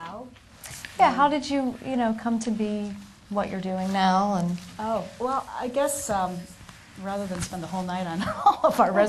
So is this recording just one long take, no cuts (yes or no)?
yes